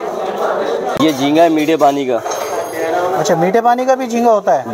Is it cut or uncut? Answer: cut